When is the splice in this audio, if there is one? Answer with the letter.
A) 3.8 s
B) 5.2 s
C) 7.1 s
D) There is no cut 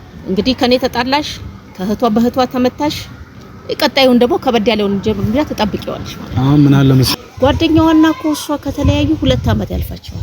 C